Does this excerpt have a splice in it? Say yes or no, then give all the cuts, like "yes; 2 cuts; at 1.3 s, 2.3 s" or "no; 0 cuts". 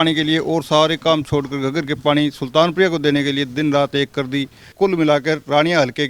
yes; 1 cut; at 4.7 s